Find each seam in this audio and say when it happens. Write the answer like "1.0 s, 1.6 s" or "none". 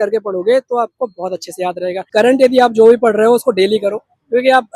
2.1 s